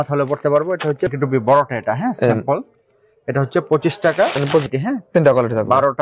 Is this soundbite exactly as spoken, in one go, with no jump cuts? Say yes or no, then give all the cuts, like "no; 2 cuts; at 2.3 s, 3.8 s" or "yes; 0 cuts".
no; 2 cuts; at 1.1 s, 4.7 s